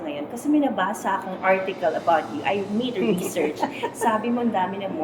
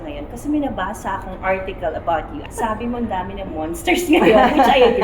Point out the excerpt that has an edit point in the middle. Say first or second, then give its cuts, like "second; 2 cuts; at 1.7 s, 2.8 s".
second; 1 cut; at 2.4 s